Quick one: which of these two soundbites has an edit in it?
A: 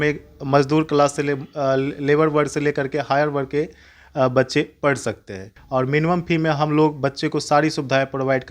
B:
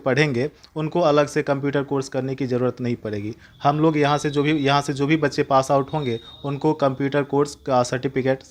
A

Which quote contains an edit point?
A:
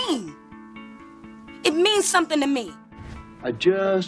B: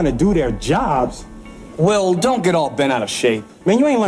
A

